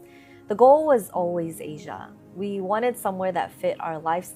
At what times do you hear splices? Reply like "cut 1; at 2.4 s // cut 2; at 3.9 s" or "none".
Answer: none